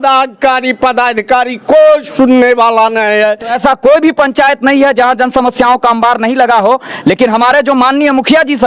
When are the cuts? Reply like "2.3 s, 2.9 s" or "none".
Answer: 3.5 s